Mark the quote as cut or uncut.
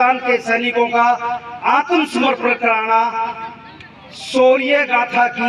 uncut